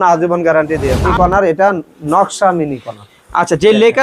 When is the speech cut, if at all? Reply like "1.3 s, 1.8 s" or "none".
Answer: 1.0 s